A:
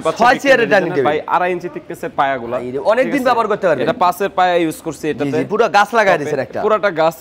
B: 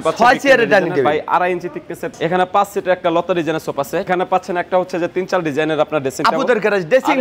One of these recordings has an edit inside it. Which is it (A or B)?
B